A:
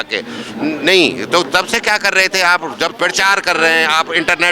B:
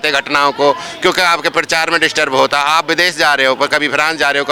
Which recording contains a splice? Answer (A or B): A